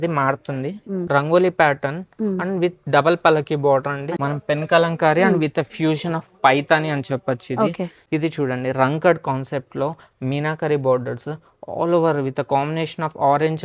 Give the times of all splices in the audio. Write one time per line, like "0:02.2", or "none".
0:01.0
0:04.1
0:08.0